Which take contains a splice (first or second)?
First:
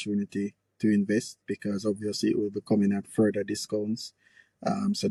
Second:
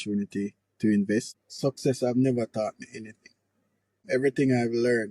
second